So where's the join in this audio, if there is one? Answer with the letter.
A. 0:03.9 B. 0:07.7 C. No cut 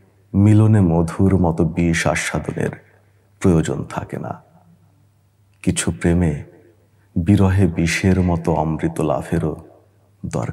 C